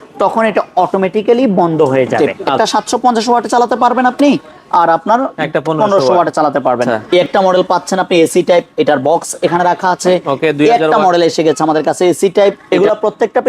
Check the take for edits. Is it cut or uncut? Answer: cut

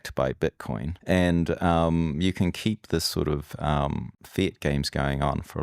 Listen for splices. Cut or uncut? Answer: cut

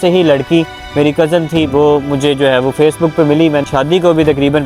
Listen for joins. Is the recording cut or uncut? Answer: cut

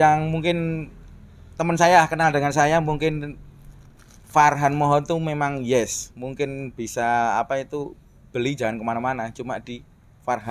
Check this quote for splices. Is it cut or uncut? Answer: uncut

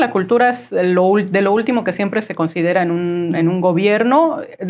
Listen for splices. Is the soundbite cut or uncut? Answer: uncut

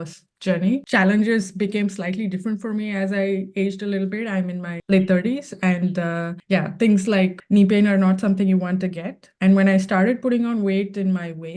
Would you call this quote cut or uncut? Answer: cut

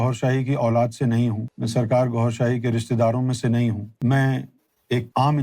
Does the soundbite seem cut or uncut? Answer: uncut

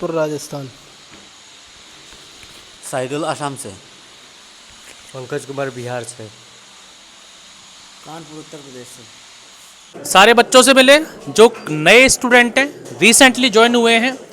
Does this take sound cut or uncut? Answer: cut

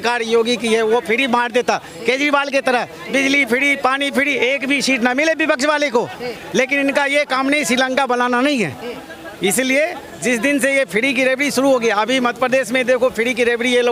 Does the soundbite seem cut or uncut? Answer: uncut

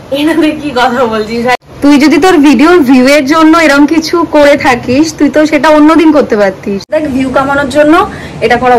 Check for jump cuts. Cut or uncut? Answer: cut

